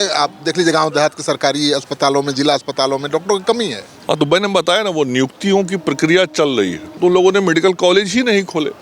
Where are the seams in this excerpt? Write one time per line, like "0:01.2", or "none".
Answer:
0:07.0

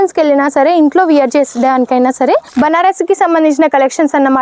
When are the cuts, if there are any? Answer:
0:02.5

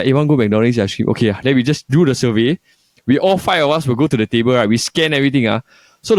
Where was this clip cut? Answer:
none

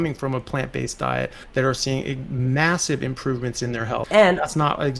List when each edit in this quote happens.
0:01.4
0:04.0

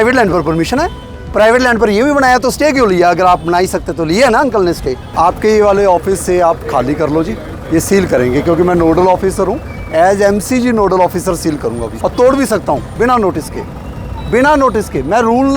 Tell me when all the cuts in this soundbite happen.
0:05.0
0:11.9

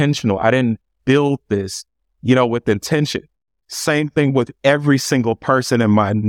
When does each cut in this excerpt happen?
0:03.6

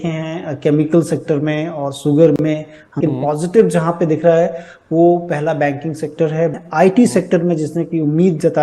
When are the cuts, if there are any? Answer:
0:03.0
0:06.6

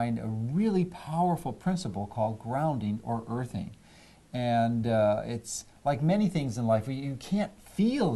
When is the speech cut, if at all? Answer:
0:01.0

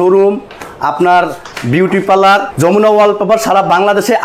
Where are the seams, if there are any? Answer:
0:02.5

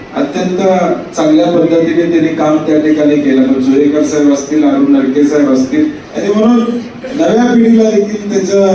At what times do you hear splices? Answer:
0:06.1

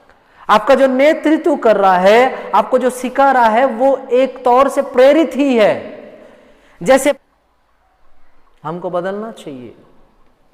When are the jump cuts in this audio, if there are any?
0:07.2

